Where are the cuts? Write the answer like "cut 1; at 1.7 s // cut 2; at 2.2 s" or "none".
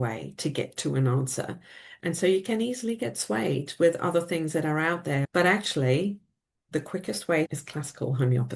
cut 1; at 5.3 s // cut 2; at 7.5 s